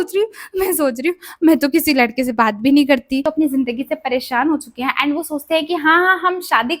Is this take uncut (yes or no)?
no